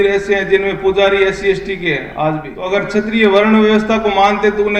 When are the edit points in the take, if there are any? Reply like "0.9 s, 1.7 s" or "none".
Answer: 2.5 s

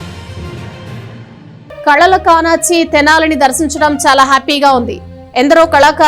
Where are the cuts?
none

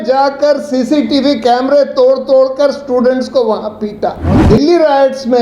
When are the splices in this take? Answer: 4.4 s

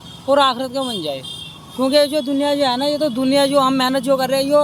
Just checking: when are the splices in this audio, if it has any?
none

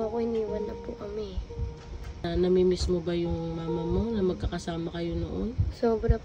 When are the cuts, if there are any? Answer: 2.2 s

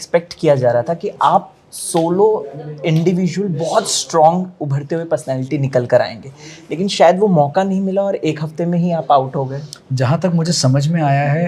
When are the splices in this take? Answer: none

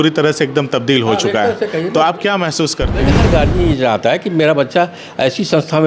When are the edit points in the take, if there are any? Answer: 3.1 s

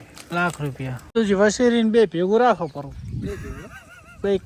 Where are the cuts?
1.0 s

